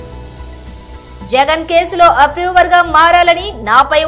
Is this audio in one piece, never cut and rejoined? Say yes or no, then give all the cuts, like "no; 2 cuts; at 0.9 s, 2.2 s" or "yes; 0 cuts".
no; 1 cut; at 1.0 s